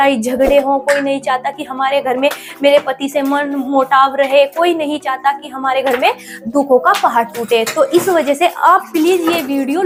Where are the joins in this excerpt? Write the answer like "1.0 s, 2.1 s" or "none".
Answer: none